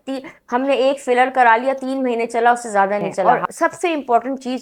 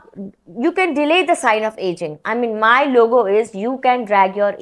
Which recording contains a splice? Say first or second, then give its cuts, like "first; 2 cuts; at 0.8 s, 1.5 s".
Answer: first; 1 cut; at 3.2 s